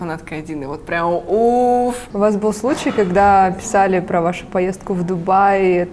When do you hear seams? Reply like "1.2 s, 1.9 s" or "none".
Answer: 2.0 s